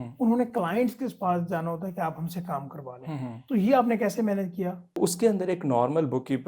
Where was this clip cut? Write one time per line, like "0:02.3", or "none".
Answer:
0:03.4
0:05.0